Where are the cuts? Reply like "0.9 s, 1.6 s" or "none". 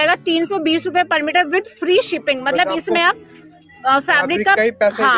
none